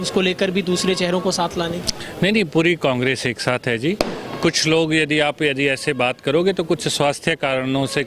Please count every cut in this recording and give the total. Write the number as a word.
zero